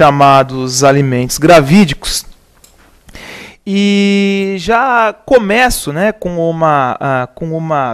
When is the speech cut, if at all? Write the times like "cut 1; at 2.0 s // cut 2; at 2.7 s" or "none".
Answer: none